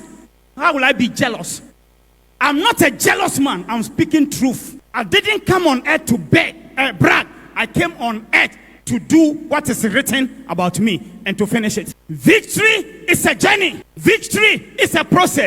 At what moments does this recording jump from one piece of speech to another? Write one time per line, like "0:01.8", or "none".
0:04.8
0:11.9